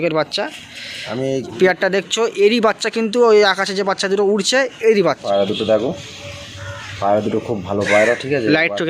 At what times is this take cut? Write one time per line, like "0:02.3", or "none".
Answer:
0:01.6
0:05.2